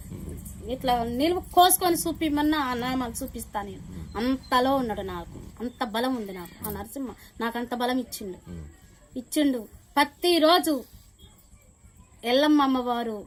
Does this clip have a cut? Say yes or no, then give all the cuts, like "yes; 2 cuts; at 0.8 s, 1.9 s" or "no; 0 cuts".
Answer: no; 0 cuts